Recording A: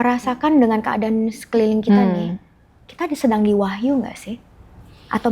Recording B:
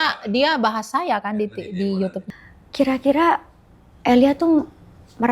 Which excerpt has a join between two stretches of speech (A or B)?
B